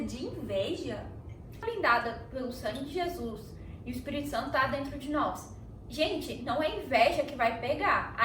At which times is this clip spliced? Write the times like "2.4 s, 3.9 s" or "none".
1.6 s